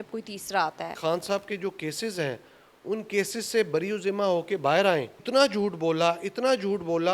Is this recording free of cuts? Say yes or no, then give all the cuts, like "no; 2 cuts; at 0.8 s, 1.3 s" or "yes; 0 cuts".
no; 2 cuts; at 1.0 s, 5.2 s